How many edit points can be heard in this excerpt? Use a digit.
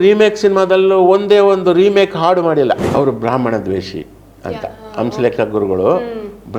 1